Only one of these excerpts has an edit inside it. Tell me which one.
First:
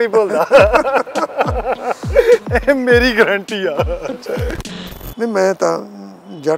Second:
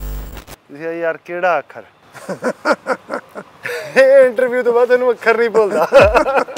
first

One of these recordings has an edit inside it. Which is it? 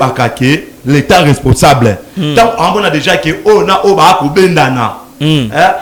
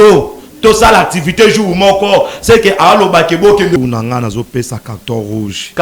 second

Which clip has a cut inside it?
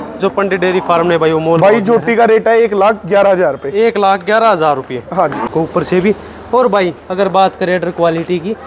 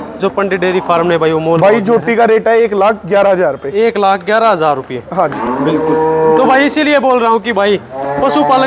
first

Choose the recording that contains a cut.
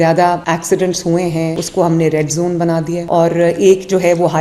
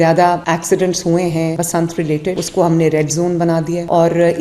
first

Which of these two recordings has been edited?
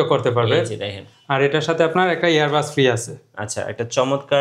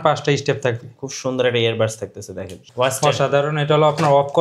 second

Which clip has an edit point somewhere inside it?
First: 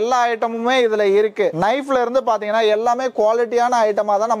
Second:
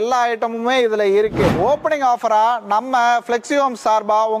second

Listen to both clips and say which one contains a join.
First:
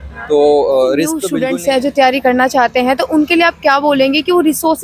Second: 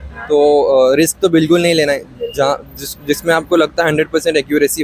first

